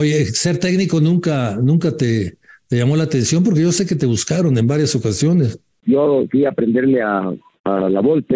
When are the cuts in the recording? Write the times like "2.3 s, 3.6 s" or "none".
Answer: 5.8 s, 7.5 s